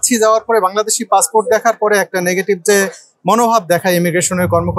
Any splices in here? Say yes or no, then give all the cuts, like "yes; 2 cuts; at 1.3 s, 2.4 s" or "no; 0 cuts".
no; 0 cuts